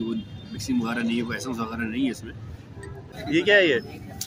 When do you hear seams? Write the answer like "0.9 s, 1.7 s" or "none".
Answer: 3.1 s